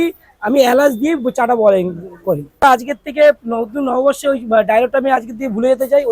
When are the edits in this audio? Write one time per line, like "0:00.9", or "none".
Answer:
0:02.6